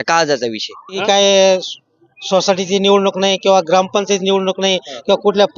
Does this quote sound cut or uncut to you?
cut